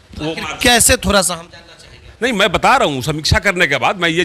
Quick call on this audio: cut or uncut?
uncut